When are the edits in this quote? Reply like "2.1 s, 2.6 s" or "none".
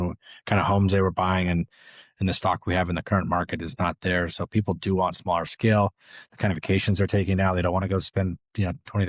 none